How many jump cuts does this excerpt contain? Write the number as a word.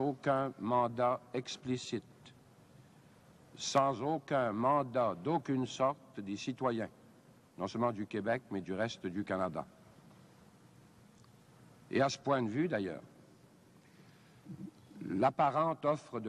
zero